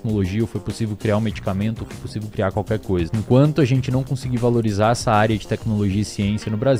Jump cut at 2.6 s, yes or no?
no